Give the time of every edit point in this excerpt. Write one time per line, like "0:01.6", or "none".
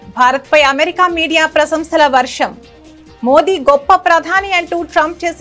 none

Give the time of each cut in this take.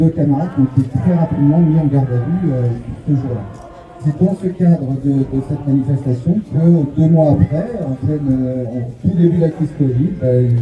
0:04.0

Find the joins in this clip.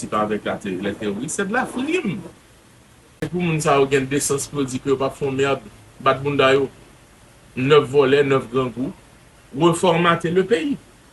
0:03.2

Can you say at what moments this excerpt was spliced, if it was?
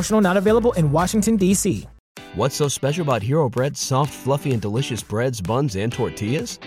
0:02.2

